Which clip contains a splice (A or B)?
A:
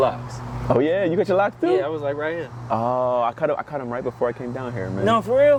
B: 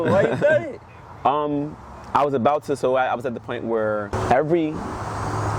B